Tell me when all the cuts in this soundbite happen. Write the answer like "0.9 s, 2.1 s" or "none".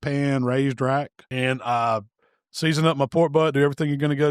1.2 s